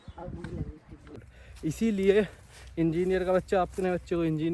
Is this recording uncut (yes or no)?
no